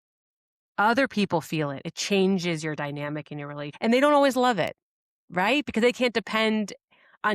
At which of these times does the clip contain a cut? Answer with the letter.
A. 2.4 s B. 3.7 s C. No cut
B